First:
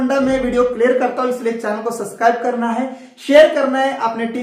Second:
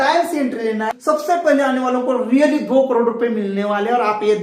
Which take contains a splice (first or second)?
second